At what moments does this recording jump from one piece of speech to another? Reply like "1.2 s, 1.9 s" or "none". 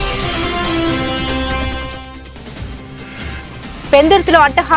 3.7 s